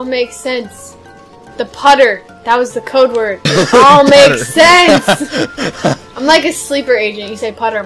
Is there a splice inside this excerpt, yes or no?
no